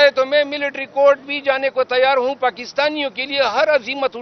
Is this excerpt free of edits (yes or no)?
yes